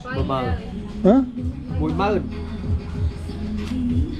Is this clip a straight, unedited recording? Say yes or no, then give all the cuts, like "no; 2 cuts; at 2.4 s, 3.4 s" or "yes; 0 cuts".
yes; 0 cuts